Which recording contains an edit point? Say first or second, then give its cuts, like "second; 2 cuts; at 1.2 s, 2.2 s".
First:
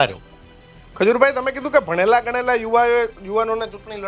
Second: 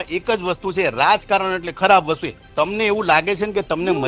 second; 1 cut; at 2.5 s